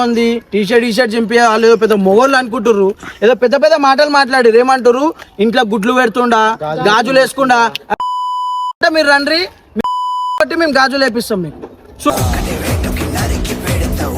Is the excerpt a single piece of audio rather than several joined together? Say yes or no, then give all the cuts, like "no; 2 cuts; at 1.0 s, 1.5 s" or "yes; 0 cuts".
yes; 0 cuts